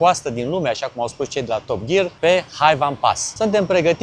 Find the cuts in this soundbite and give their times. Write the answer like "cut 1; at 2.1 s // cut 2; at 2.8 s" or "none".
none